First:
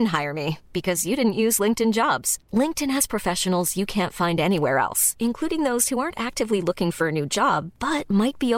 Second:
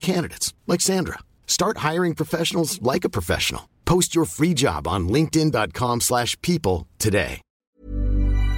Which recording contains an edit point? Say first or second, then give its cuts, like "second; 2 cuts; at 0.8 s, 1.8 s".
second; 1 cut; at 7.6 s